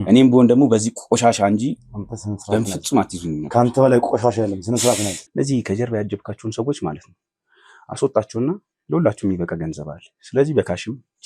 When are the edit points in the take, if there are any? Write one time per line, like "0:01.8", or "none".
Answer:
0:05.2